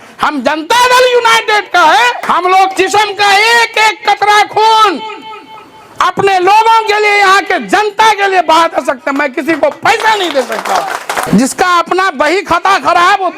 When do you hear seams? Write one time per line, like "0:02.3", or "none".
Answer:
0:02.2
0:11.2